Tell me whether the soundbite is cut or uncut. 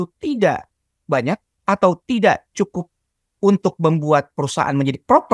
uncut